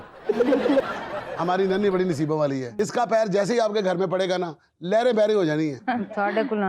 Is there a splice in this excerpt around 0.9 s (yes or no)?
yes